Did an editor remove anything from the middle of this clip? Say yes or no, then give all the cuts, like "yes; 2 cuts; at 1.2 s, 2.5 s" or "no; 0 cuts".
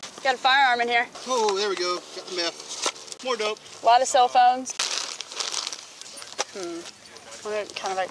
yes; 4 cuts; at 1.2 s, 3.6 s, 4.7 s, 6.1 s